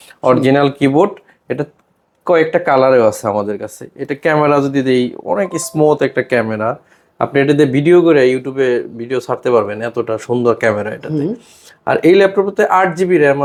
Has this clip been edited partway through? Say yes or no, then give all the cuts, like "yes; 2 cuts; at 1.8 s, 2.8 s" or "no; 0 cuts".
no; 0 cuts